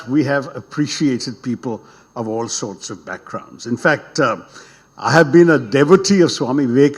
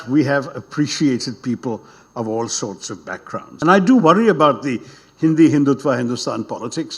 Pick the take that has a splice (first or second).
second